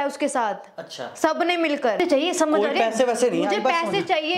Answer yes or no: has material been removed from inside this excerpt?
yes